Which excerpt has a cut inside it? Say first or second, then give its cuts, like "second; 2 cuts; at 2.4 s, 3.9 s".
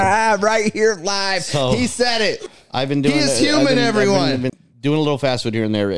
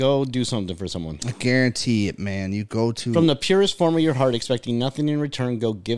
first; 2 cuts; at 2.5 s, 4.5 s